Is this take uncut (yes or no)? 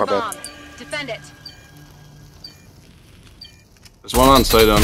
yes